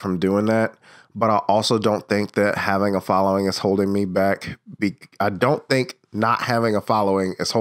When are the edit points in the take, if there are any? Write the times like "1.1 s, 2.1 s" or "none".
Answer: none